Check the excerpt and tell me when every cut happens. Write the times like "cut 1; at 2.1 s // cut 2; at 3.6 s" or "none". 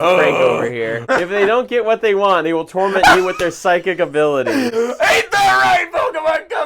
cut 1; at 1.0 s